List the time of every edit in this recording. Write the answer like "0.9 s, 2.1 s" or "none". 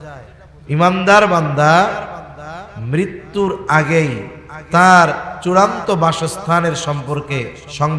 none